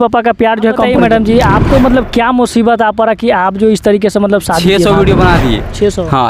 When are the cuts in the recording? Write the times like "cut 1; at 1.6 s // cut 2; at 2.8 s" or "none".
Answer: cut 1; at 0.9 s // cut 2; at 4.6 s